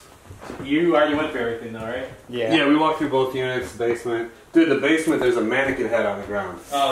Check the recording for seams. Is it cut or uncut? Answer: uncut